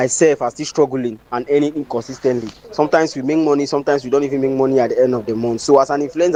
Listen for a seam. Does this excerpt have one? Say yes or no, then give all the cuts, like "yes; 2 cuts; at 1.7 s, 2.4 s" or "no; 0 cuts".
no; 0 cuts